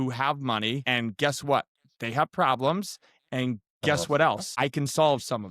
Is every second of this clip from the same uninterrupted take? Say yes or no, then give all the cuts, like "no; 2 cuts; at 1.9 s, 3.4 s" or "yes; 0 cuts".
no; 2 cuts; at 0.8 s, 4.5 s